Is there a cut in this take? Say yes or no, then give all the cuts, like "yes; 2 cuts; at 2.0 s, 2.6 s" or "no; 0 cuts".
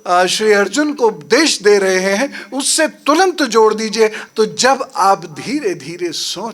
yes; 1 cut; at 4.2 s